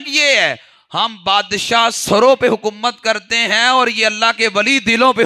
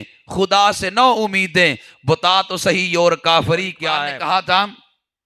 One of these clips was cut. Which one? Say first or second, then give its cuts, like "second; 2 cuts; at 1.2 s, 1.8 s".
second; 1 cut; at 3.8 s